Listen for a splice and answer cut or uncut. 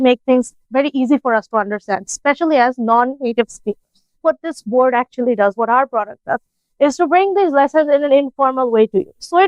cut